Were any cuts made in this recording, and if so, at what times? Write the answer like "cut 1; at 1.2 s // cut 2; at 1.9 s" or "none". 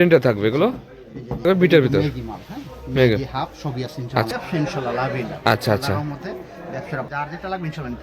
cut 1; at 1.5 s // cut 2; at 4.3 s // cut 3; at 7.1 s